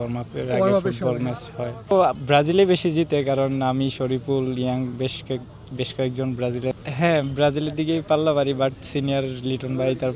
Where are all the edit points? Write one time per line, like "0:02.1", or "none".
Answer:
0:01.9
0:06.7